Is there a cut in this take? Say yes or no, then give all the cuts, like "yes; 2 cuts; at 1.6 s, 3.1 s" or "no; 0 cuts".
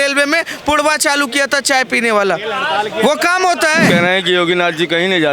yes; 1 cut; at 3.9 s